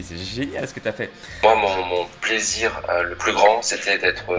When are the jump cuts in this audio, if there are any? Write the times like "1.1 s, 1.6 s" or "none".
1.4 s